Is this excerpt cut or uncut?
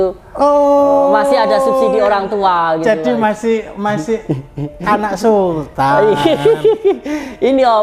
uncut